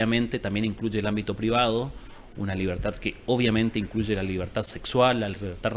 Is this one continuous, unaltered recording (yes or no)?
yes